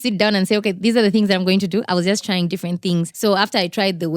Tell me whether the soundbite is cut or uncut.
cut